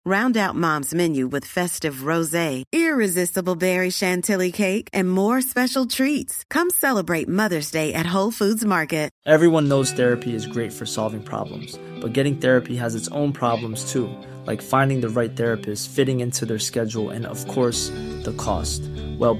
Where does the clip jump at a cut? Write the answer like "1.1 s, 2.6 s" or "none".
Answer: 9.1 s